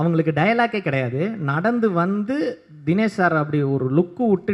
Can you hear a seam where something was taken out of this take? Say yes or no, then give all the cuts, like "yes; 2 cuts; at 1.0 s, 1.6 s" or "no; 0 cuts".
no; 0 cuts